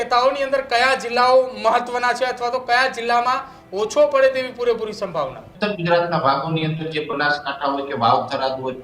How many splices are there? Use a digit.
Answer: 1